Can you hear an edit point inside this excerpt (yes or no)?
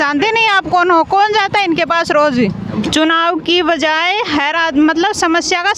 yes